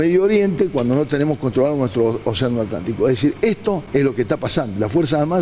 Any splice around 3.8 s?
yes; 1 cut; at 3.8 s

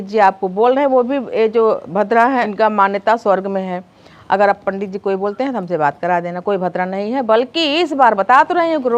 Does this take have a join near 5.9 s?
no; 0 cuts

